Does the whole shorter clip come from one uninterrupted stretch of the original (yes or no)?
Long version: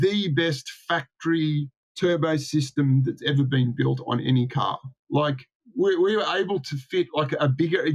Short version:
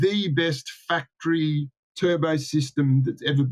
yes